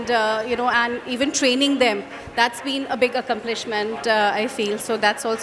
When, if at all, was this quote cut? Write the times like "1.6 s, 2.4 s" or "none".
none